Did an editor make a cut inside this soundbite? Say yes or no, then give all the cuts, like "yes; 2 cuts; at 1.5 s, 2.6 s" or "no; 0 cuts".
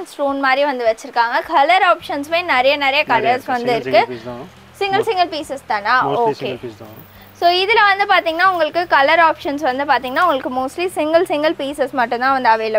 no; 0 cuts